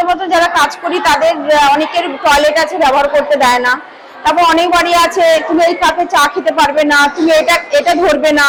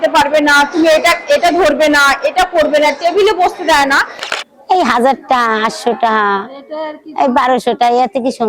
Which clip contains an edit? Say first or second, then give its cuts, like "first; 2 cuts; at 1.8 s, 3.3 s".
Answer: second; 1 cut; at 4.2 s